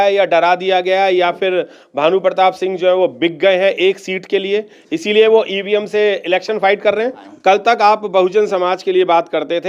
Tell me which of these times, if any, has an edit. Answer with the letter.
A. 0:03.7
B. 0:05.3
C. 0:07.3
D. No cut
C